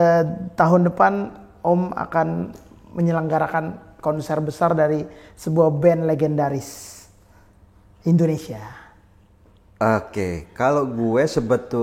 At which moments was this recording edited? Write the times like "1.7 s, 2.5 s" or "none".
none